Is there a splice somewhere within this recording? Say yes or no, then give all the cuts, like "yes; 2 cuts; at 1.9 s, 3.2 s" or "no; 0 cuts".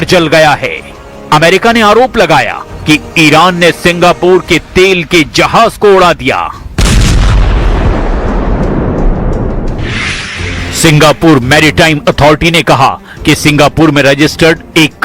yes; 1 cut; at 13.9 s